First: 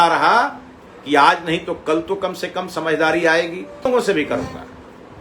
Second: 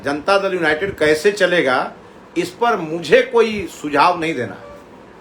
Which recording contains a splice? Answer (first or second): first